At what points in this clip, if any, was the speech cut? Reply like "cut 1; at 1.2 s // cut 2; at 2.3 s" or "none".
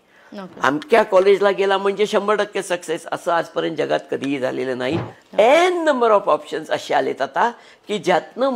cut 1; at 5.2 s